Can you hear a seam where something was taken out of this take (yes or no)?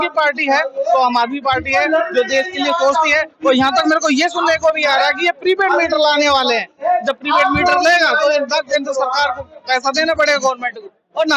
no